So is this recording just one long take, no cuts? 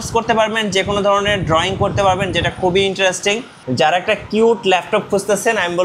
no; 1 cut; at 3.5 s

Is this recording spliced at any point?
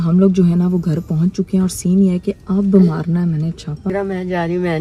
yes; 1 cut; at 3.9 s

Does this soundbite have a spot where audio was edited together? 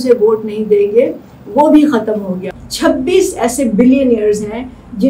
yes; 1 cut; at 2.4 s

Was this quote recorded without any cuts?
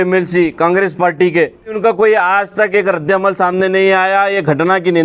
no; 1 cut; at 1.8 s

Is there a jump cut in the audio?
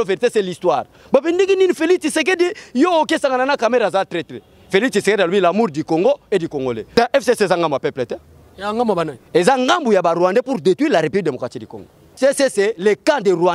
yes; 2 cuts; at 6.8 s, 12.1 s

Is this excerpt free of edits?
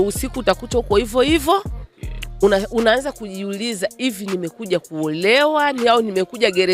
yes; 0 cuts

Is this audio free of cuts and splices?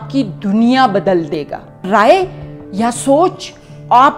no; 1 cut; at 1.8 s

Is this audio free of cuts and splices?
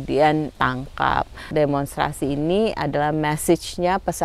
no; 1 cut; at 1.3 s

